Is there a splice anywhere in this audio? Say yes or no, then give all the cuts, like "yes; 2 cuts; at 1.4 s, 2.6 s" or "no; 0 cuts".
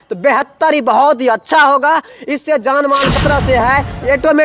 yes; 1 cut; at 3.2 s